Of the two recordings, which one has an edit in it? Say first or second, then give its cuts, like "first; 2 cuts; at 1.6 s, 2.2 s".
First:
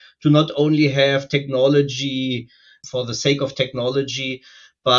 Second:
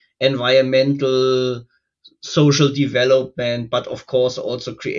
first; 1 cut; at 2.8 s